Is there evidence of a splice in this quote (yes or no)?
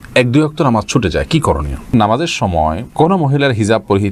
yes